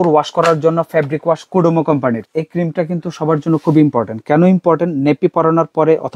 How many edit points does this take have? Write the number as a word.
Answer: one